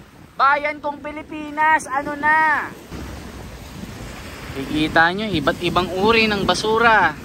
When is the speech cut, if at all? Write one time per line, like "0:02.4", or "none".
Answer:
0:03.0